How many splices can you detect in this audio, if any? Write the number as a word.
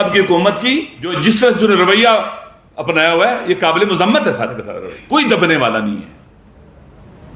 two